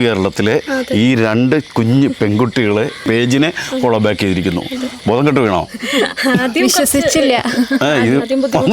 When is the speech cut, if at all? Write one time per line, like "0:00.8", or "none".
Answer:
none